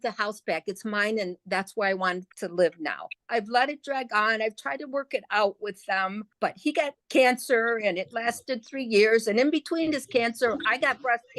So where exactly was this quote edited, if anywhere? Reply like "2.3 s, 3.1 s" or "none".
3.2 s, 6.8 s